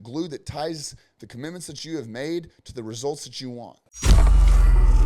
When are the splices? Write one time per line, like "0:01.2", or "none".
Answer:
0:03.8